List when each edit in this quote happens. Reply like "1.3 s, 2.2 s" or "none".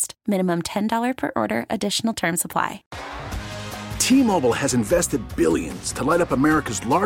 2.9 s